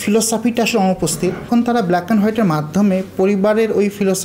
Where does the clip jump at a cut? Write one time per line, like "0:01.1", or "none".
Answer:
0:01.5